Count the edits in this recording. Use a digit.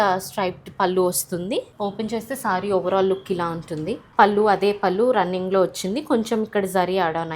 2